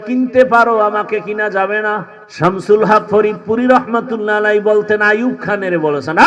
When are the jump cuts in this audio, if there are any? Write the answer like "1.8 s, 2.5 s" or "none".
2.2 s